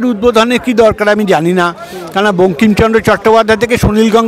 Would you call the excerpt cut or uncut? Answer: uncut